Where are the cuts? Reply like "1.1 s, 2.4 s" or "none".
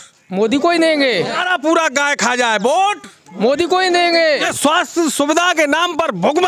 1.4 s, 4.5 s